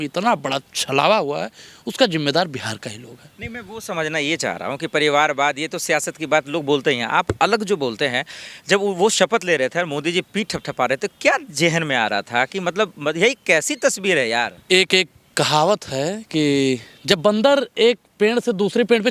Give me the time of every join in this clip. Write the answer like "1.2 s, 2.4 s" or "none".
none